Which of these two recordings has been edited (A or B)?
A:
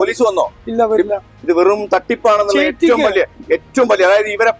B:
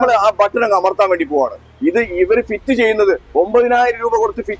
B